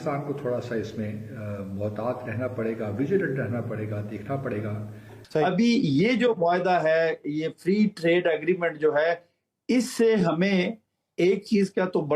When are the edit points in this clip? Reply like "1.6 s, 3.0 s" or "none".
5.4 s